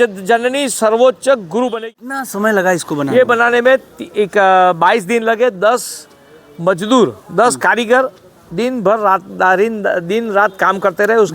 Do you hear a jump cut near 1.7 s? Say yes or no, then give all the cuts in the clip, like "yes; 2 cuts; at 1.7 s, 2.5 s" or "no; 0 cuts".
yes; 1 cut; at 1.7 s